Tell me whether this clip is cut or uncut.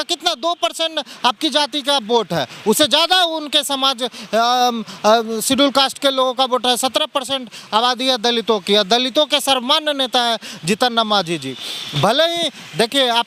uncut